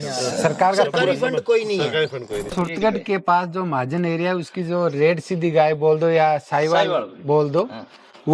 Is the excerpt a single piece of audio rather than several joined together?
no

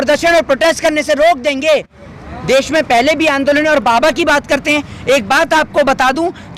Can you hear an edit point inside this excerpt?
no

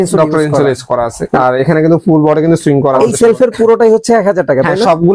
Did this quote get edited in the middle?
yes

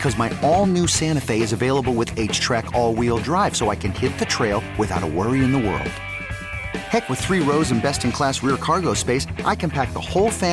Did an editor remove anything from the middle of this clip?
no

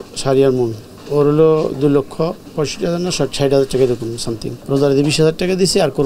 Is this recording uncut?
no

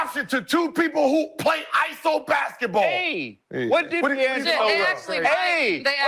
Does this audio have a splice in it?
no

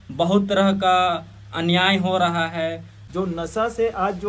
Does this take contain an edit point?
yes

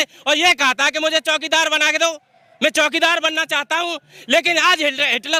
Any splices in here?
no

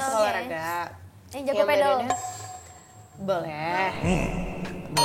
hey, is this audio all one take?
yes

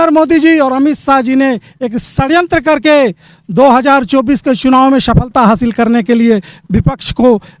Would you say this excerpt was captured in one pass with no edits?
yes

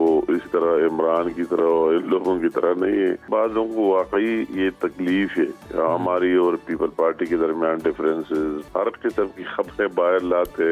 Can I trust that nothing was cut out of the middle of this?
no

